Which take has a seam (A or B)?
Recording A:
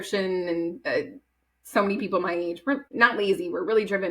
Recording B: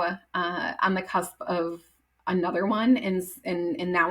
A